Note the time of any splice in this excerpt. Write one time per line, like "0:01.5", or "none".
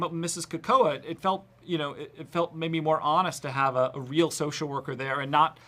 none